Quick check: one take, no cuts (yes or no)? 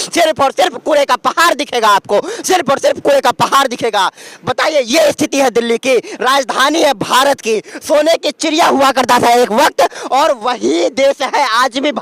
yes